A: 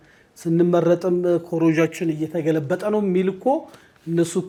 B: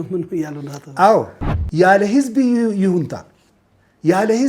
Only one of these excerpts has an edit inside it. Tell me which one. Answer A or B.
B